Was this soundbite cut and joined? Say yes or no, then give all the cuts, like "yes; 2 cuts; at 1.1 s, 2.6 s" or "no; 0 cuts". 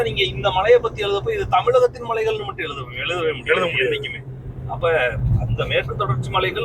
no; 0 cuts